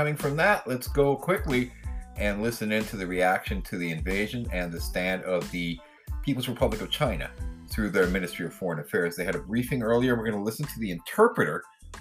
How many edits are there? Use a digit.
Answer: 0